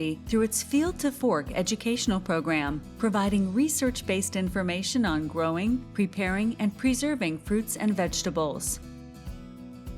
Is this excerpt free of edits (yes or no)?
no